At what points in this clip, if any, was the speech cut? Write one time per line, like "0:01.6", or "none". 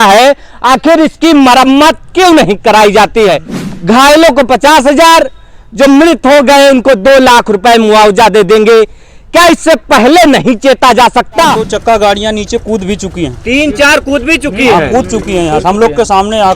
0:03.5
0:11.6